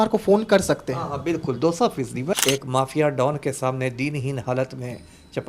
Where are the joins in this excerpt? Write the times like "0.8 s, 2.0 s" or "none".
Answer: 2.4 s

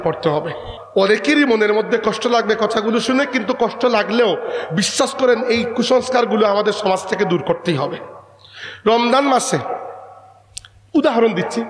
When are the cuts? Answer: 1.1 s

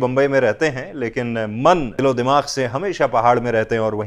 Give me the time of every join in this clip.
1.9 s

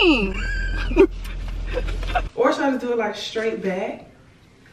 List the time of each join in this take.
2.3 s

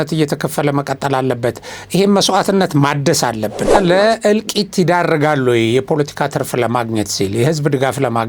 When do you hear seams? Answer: 3.7 s

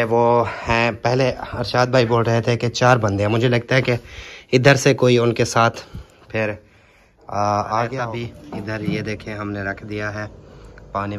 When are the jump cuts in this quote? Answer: 8.0 s

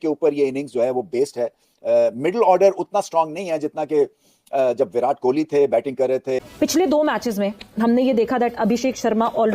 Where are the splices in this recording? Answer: 6.5 s

